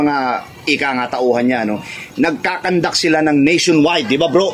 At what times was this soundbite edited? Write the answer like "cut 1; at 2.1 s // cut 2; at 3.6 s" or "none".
none